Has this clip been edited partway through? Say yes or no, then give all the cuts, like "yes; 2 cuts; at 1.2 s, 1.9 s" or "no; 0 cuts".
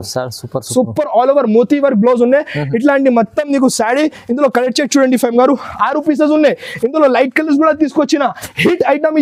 no; 0 cuts